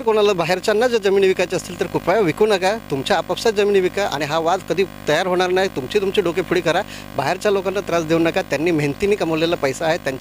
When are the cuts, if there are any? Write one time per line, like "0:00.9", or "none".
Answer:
none